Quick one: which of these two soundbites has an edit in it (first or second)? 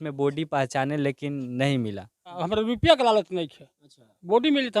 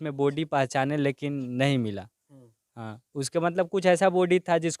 first